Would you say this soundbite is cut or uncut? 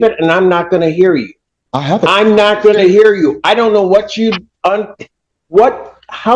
uncut